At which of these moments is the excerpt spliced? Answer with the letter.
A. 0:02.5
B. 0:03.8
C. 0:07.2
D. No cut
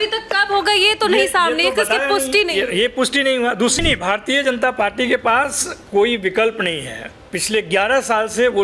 B